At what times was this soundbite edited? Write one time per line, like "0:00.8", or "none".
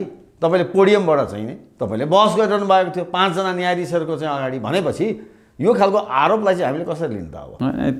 none

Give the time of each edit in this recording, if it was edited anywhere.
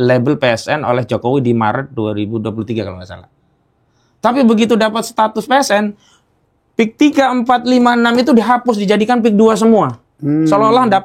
none

